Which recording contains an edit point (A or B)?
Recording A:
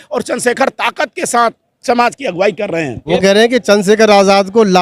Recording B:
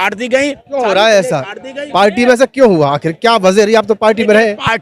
A